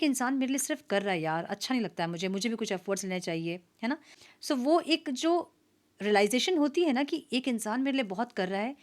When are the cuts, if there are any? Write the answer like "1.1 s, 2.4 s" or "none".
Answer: 4.1 s

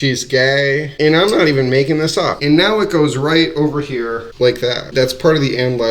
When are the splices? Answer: 1.0 s, 2.4 s

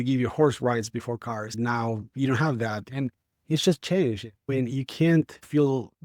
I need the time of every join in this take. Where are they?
1.5 s

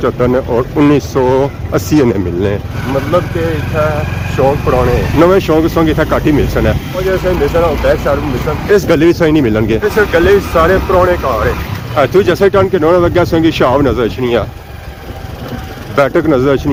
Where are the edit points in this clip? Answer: none

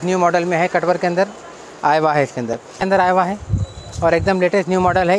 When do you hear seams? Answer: 2.8 s

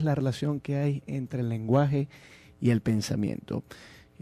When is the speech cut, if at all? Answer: 2.2 s

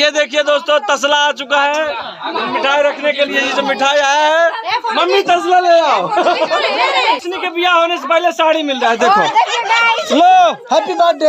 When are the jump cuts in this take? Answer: 7.2 s

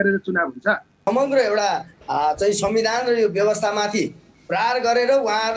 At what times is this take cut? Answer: 1.0 s

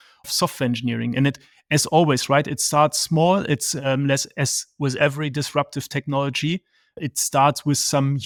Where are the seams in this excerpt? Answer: none

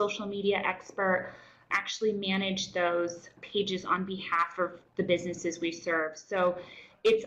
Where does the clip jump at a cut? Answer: 1.6 s, 3.4 s

